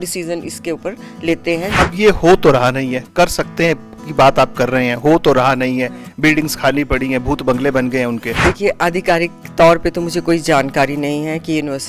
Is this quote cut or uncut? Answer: cut